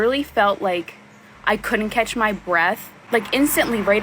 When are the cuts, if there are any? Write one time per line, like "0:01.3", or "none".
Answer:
none

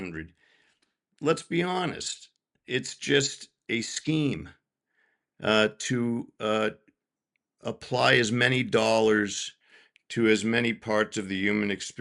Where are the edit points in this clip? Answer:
none

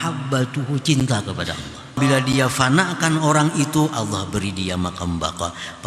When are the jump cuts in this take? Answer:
0:02.0

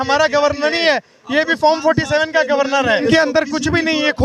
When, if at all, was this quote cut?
0:03.0

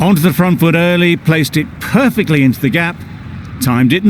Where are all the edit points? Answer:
none

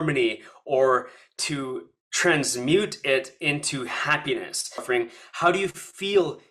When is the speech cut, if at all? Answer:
0:04.8

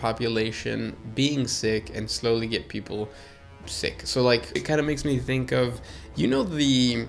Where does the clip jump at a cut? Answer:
0:04.6

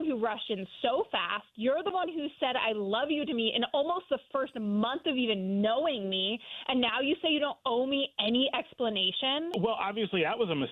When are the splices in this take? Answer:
0:09.5

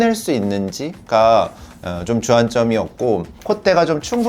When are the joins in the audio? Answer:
0:03.3

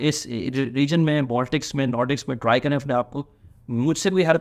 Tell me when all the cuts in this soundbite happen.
none

